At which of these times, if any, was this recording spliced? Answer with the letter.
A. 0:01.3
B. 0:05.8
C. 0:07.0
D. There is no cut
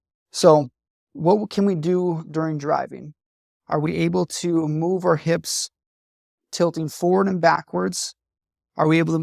D